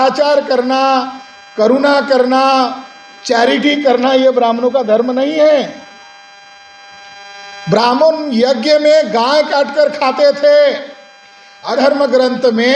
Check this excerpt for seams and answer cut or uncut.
cut